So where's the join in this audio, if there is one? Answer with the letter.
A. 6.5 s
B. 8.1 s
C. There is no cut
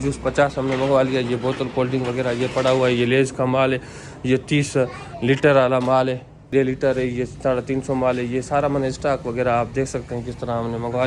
A